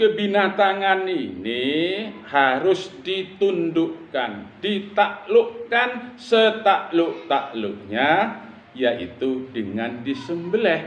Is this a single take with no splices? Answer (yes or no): yes